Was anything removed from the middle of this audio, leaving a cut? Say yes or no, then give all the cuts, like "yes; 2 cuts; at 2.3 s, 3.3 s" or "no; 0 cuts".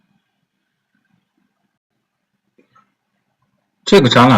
no; 0 cuts